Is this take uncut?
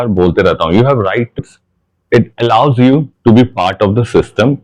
no; 1 cut; at 1.4 s

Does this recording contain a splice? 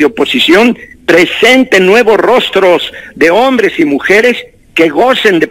no; 0 cuts

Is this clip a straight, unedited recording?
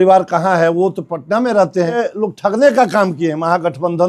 no; 1 cut; at 2.0 s

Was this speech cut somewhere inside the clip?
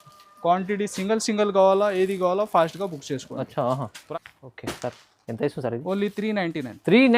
yes; 1 cut; at 4.0 s

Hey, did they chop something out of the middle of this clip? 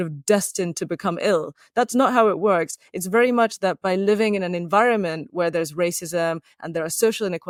no; 0 cuts

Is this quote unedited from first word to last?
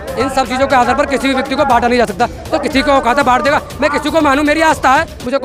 yes; 0 cuts

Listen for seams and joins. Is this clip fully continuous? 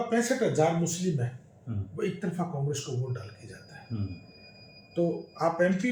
yes; 0 cuts

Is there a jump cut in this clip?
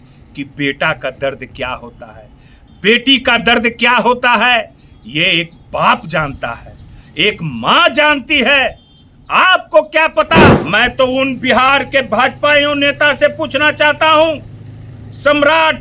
yes; 1 cut; at 10.6 s

